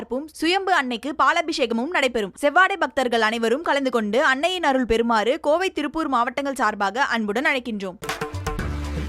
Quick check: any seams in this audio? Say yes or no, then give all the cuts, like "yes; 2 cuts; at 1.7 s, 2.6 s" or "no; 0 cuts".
yes; 1 cut; at 8.0 s